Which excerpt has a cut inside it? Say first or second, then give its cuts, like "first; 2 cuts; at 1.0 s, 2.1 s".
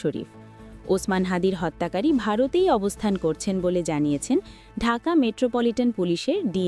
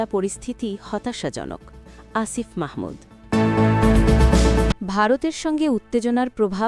second; 2 cuts; at 3.1 s, 4.7 s